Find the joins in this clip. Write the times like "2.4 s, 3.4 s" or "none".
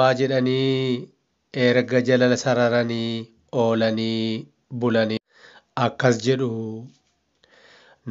5.2 s